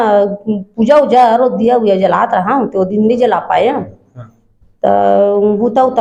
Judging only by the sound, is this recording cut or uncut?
uncut